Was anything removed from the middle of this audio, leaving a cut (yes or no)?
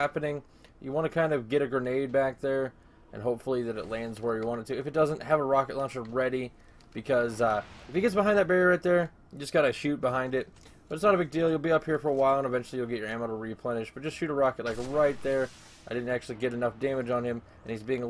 yes